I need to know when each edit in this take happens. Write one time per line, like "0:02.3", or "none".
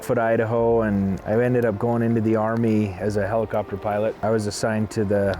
0:01.2
0:04.2